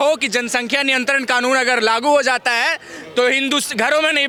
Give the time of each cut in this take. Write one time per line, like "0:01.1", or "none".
none